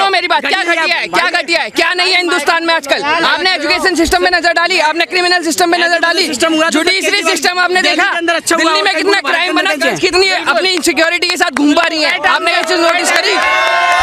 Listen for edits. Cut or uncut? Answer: uncut